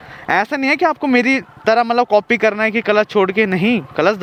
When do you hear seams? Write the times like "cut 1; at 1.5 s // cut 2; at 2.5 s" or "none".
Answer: none